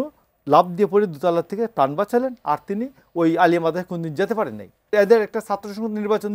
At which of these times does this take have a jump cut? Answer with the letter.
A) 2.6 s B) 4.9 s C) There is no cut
B